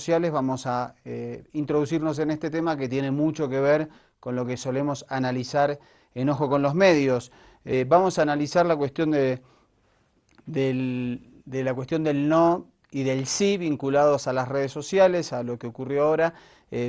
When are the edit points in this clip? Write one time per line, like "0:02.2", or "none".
0:11.9